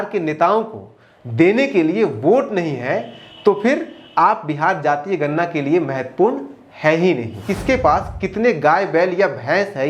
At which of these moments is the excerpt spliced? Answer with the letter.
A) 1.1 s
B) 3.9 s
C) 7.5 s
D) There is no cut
C